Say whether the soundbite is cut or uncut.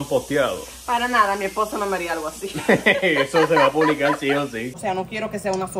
cut